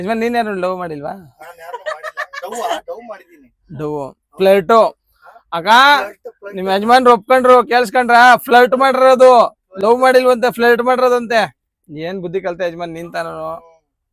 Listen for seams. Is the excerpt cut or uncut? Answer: uncut